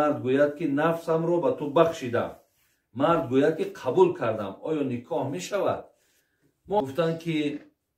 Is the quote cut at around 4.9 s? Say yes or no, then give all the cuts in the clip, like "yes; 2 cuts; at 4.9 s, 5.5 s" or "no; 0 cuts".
no; 1 cut; at 6.8 s